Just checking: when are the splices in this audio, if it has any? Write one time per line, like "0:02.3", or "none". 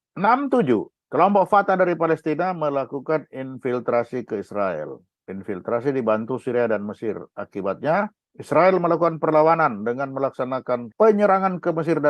0:00.9